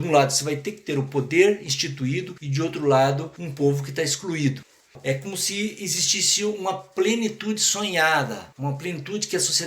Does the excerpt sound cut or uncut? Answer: cut